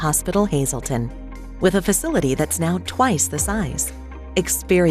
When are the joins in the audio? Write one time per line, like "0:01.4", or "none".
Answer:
0:01.1